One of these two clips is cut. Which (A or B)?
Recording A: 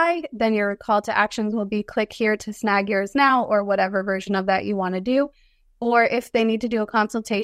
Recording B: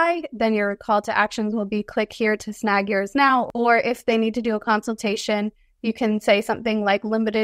B